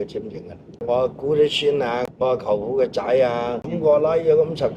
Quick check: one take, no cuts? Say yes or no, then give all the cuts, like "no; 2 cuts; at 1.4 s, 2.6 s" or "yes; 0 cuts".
no; 3 cuts; at 0.8 s, 2.0 s, 3.7 s